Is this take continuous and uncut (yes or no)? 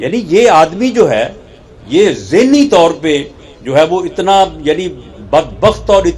yes